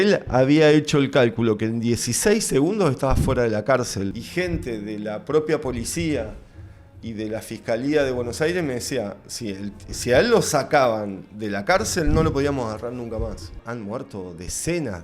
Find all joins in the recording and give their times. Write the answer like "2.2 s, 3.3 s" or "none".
4.1 s, 13.6 s